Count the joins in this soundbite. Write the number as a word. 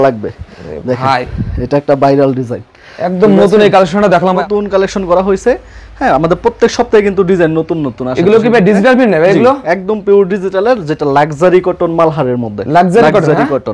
one